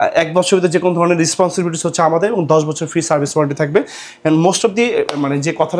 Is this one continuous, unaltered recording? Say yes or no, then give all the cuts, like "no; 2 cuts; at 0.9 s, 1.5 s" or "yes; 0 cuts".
yes; 0 cuts